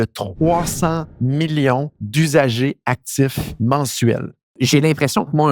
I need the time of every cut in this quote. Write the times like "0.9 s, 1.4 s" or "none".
1.1 s, 2.0 s, 3.4 s, 4.5 s